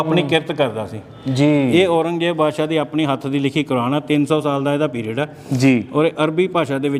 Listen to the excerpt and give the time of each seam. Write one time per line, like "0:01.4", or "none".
none